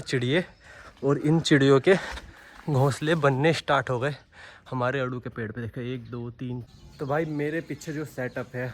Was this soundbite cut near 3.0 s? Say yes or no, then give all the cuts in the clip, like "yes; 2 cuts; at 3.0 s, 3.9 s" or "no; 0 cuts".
no; 1 cut; at 6.6 s